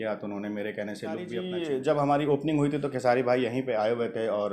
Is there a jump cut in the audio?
yes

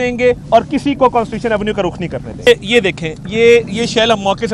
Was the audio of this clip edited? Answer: yes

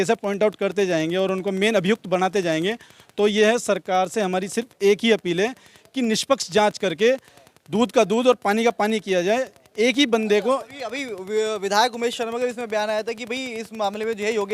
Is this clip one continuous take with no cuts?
yes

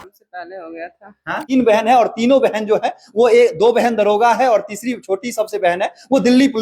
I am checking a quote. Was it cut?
yes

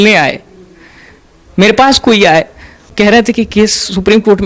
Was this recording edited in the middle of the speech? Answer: no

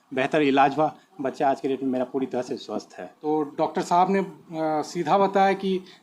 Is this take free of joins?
no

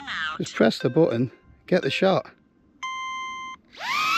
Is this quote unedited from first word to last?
yes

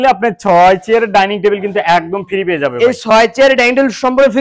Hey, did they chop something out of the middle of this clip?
no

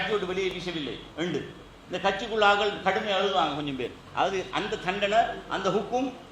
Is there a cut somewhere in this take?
yes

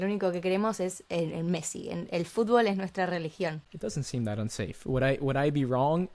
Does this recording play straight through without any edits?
no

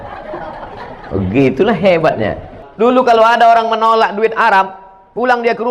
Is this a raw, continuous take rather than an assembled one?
no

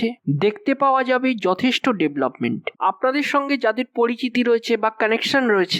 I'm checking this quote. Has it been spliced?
yes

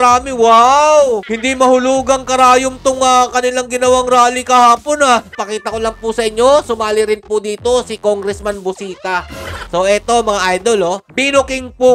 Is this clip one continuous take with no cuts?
no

